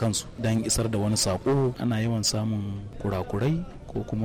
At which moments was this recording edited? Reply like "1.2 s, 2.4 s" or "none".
1.8 s